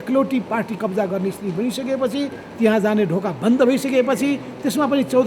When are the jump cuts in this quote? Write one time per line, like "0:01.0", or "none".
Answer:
none